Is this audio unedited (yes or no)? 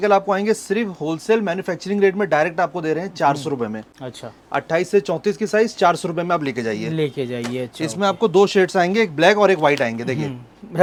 yes